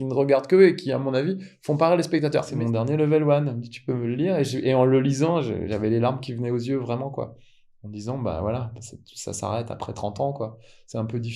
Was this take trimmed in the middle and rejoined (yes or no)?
yes